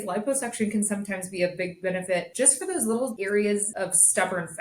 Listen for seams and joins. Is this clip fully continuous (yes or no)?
no